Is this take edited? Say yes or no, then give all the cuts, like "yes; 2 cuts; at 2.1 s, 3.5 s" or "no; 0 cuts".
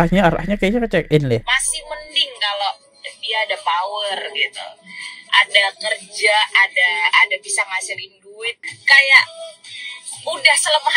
yes; 2 cuts; at 1.4 s, 8.7 s